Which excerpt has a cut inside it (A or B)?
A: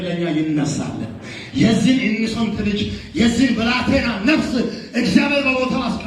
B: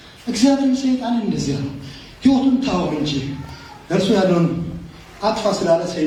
A